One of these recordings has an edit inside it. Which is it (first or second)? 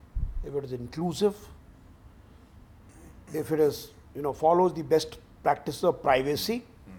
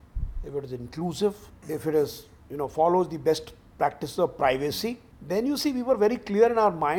second